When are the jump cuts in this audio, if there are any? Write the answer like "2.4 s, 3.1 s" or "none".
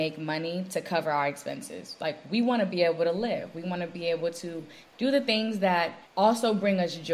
4.8 s, 6.0 s